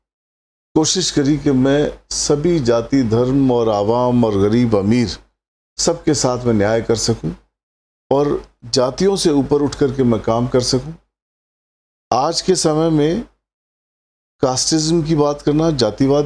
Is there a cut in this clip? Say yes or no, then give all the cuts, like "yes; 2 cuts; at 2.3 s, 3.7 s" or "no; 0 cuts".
no; 0 cuts